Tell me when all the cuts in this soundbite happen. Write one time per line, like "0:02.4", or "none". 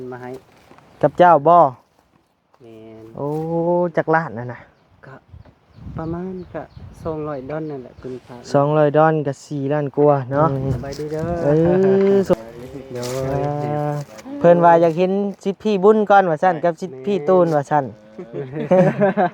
0:12.4